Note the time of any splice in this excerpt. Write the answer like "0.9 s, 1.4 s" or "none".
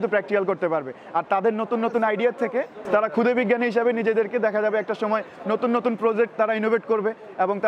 2.8 s